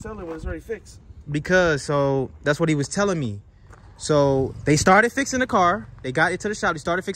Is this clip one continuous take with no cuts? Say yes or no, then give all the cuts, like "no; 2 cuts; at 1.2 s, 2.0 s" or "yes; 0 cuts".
yes; 0 cuts